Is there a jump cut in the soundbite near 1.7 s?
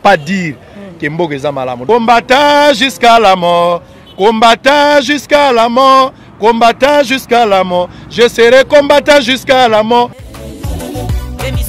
yes; 2 cuts; at 1.7 s, 10.2 s

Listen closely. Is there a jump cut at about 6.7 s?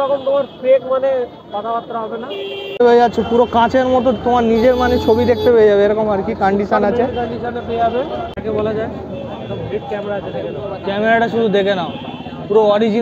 no; 2 cuts; at 2.7 s, 8.4 s

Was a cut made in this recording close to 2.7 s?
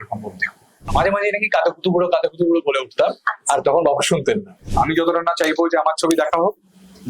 no; 2 cuts; at 0.9 s, 4.6 s

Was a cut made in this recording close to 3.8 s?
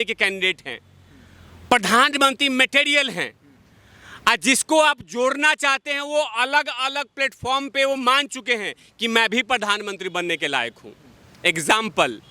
no; 0 cuts

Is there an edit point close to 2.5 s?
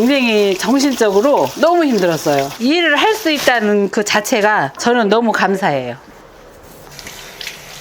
yes; 2 cuts; at 2.5 s, 6.1 s

